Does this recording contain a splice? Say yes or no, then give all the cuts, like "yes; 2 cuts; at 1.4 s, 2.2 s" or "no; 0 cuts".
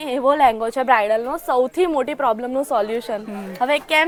no; 0 cuts